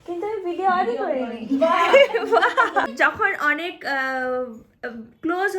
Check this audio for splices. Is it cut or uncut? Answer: cut